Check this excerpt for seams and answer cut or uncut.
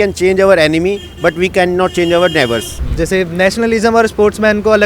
cut